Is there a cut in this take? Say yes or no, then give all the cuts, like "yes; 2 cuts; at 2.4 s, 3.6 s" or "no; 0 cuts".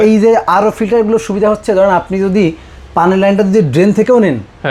no; 0 cuts